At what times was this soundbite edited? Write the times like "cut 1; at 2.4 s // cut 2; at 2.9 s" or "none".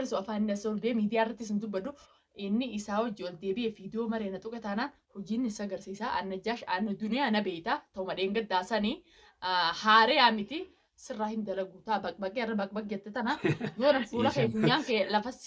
none

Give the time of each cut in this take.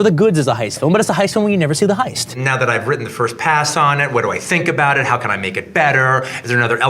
cut 1; at 2.3 s

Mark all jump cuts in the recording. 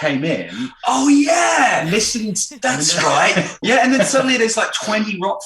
cut 1; at 2.4 s // cut 2; at 3.5 s

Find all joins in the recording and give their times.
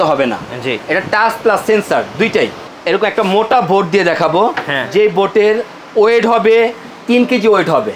cut 1; at 2.7 s

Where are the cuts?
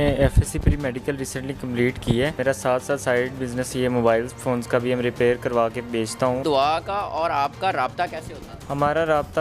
cut 1; at 2.4 s // cut 2; at 6.4 s

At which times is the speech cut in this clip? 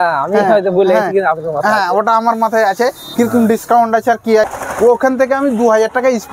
cut 1; at 4.5 s

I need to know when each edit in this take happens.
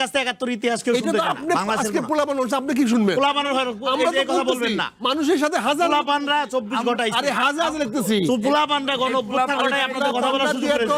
none

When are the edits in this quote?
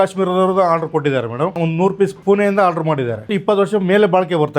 cut 1; at 3.3 s

